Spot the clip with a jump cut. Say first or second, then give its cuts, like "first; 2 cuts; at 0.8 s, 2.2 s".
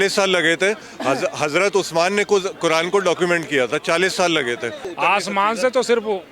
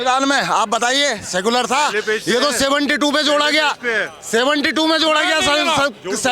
first; 1 cut; at 4.8 s